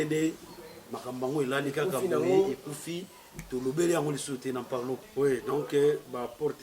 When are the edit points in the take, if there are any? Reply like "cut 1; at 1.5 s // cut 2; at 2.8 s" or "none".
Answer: cut 1; at 5.0 s

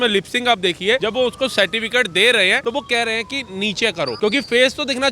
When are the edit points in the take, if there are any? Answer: cut 1; at 1.0 s // cut 2; at 2.6 s // cut 3; at 4.2 s

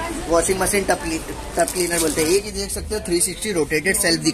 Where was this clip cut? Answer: cut 1; at 2.2 s

